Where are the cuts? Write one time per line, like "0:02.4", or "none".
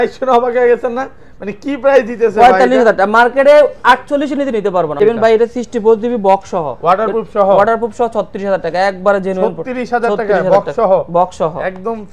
0:05.0

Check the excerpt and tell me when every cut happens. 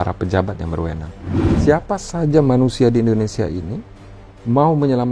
0:01.6

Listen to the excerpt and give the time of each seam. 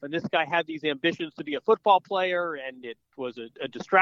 none

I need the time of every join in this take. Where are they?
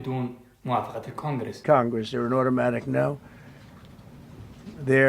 0:01.6

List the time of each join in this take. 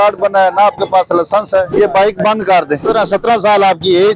0:01.7
0:02.8

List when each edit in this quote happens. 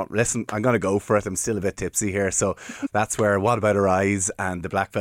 0:02.8

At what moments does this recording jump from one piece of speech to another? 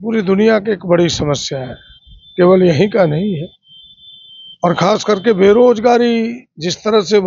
none

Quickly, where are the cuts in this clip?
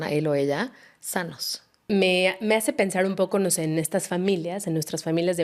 0:01.8

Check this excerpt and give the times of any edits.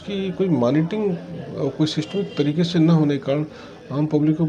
none

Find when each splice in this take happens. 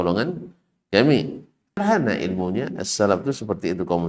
0:01.8

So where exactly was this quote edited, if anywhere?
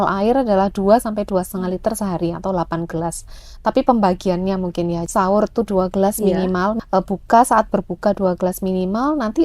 0:05.0
0:06.8

